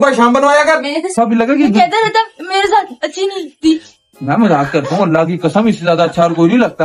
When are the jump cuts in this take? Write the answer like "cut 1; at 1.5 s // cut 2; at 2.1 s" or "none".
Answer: cut 1; at 1.1 s

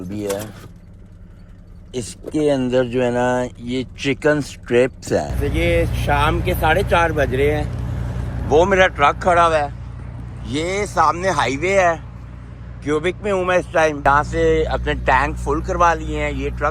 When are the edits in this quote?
cut 1; at 5.3 s // cut 2; at 14.0 s

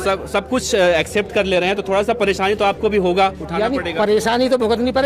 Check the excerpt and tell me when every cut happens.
none

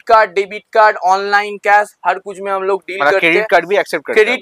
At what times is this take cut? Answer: none

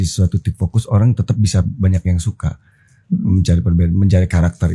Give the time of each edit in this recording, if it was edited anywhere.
none

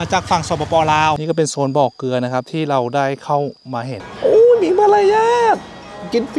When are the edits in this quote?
cut 1; at 1.2 s // cut 2; at 4.0 s

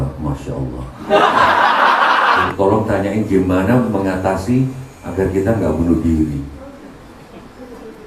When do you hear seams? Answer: cut 1; at 2.5 s

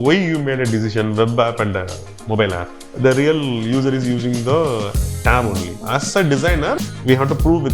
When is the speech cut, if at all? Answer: cut 1; at 2.9 s // cut 2; at 5.7 s // cut 3; at 6.8 s

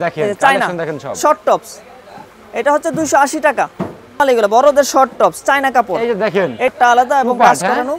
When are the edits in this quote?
cut 1; at 4.2 s // cut 2; at 6.7 s

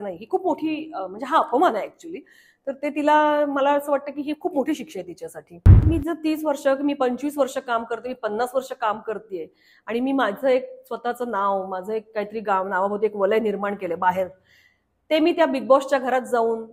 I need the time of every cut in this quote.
cut 1; at 5.8 s

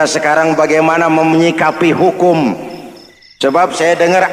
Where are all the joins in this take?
none

